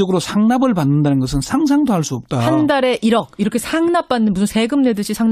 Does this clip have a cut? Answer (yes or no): yes